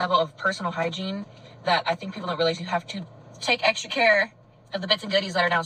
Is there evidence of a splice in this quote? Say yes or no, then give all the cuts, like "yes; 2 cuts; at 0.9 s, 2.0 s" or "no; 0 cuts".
no; 0 cuts